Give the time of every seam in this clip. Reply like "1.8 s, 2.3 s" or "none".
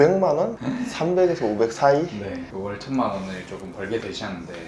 2.3 s